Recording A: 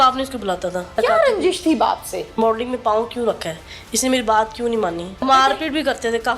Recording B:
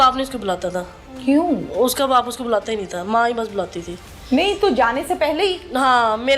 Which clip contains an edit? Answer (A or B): A